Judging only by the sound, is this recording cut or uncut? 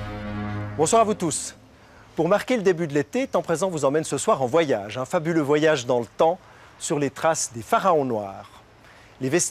uncut